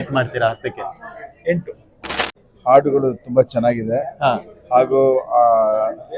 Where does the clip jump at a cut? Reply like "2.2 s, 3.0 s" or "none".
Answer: 2.3 s